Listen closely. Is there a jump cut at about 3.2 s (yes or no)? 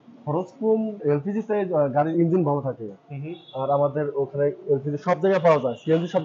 no